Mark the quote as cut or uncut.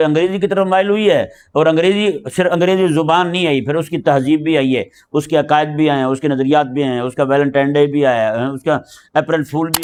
uncut